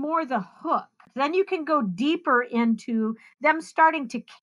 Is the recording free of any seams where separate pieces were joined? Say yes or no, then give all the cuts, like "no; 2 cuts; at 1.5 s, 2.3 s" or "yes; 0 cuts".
no; 1 cut; at 1.1 s